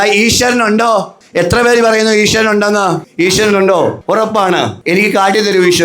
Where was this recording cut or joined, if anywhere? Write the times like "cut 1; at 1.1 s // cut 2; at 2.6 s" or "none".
cut 1; at 1.2 s // cut 2; at 3.1 s // cut 3; at 4.4 s